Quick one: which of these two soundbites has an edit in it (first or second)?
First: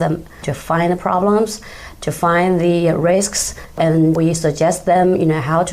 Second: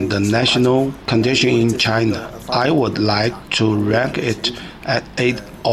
second